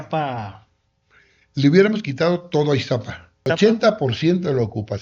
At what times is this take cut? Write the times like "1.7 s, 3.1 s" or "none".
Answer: 3.5 s